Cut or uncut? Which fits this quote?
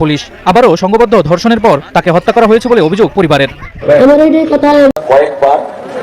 cut